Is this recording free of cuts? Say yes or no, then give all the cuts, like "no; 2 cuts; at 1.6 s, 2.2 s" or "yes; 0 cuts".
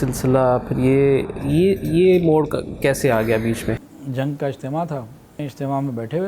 no; 2 cuts; at 3.9 s, 5.5 s